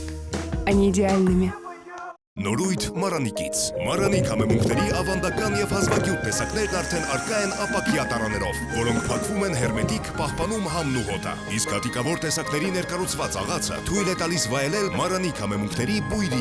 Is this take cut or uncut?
cut